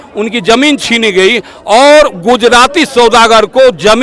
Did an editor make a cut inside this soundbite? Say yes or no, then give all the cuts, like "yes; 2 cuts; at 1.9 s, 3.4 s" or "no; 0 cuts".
no; 0 cuts